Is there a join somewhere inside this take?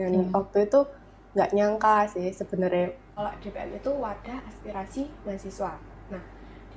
yes; 1 cut; at 3.1 s

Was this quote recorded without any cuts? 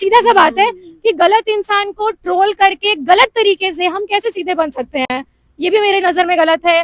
yes; 0 cuts

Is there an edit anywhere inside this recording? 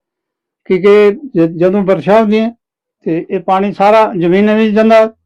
no; 0 cuts

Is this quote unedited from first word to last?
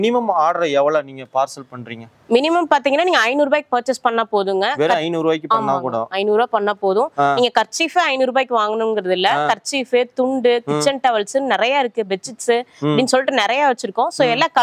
yes; 0 cuts

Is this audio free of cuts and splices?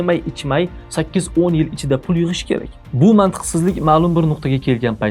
no; 1 cut; at 2.8 s

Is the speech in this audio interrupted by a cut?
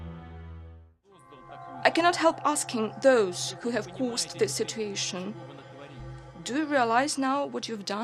no; 0 cuts

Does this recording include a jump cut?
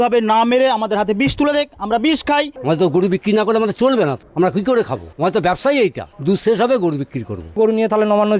yes; 5 cuts; at 2.5 s, 4.2 s, 5.0 s, 6.1 s, 7.6 s

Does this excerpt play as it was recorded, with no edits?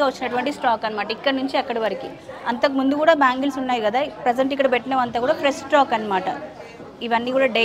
yes; 0 cuts

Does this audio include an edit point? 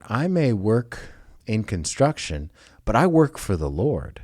yes; 1 cut; at 1.3 s

